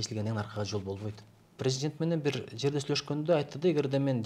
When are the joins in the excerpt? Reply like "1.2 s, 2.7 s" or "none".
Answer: 1.6 s

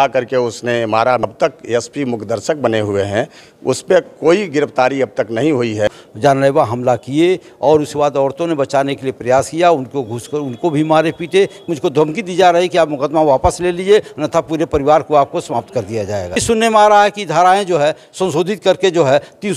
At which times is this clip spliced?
1.2 s, 5.9 s, 11.7 s, 16.4 s

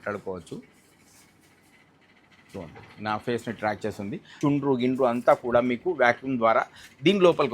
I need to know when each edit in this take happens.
4.3 s

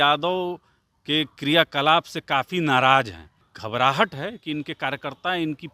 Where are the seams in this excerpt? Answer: 3.5 s

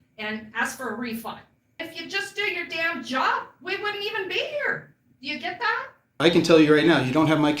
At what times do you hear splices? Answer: 1.9 s, 6.2 s

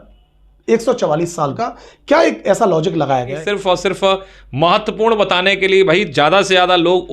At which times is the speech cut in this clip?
1.5 s, 3.4 s

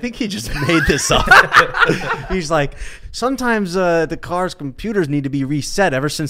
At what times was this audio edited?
none

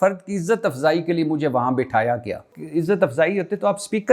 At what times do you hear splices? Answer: 2.5 s

